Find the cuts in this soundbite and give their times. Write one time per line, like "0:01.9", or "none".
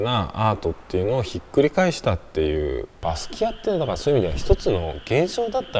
0:03.0